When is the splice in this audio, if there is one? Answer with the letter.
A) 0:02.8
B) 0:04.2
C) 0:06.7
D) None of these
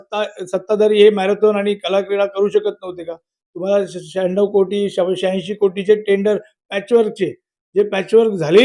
D